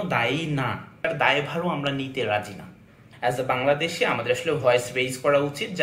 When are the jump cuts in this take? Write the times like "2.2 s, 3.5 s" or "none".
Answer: 1.1 s, 3.0 s